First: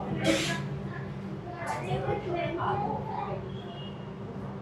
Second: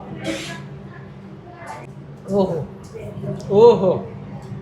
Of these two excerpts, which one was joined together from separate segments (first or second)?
second